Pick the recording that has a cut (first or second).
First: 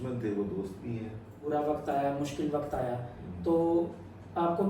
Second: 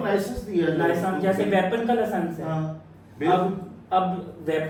first